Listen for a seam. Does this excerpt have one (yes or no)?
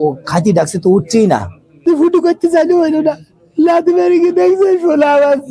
yes